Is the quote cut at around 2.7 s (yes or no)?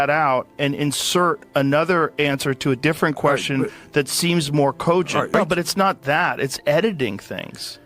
no